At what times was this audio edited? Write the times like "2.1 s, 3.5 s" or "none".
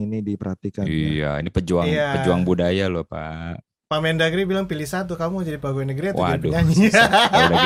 none

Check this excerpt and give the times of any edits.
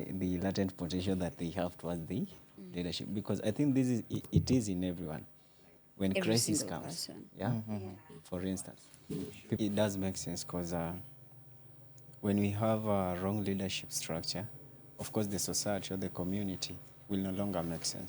9.6 s

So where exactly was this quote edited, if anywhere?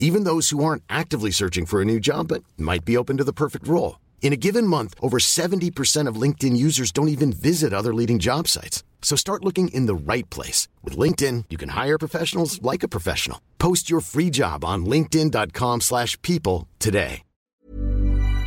17.4 s

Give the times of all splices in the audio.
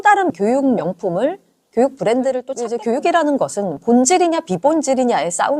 0.8 s, 2.5 s

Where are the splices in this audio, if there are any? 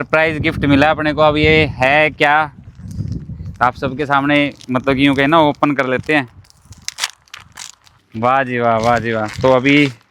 none

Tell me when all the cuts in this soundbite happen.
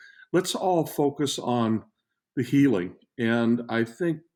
none

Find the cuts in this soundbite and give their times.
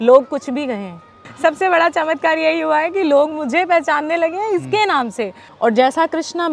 1.2 s, 5.4 s

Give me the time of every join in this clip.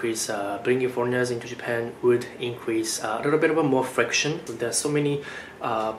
4.5 s

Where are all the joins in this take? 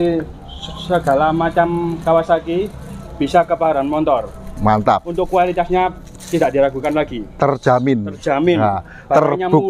none

